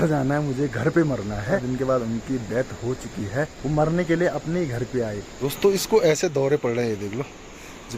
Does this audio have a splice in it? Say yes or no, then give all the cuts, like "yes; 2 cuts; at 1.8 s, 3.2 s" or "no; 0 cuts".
yes; 3 cuts; at 1.6 s, 3.6 s, 5.3 s